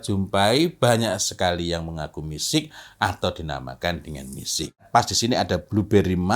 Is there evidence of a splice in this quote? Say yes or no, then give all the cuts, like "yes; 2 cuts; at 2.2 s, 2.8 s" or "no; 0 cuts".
yes; 1 cut; at 4.8 s